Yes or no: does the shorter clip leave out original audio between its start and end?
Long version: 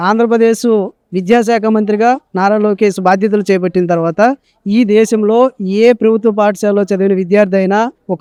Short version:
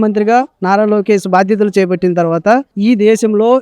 yes